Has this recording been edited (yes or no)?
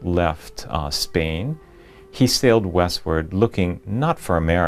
yes